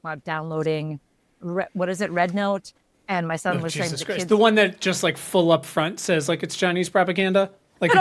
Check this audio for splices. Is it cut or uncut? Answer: uncut